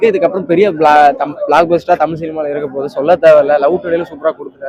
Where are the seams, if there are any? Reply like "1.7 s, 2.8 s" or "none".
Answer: none